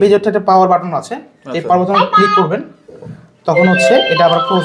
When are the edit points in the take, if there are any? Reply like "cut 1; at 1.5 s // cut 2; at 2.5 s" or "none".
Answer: none